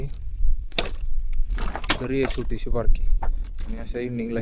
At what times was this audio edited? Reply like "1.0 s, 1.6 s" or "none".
none